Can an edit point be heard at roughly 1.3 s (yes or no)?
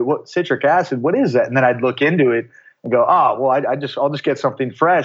no